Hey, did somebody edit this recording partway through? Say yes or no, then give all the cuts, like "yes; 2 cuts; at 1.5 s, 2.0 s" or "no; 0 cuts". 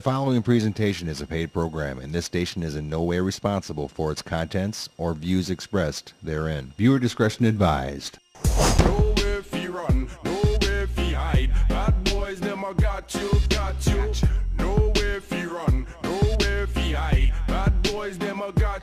no; 0 cuts